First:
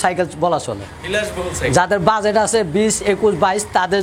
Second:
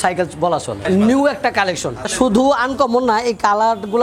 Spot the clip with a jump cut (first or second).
second